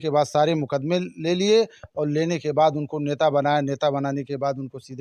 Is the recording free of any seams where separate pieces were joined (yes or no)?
yes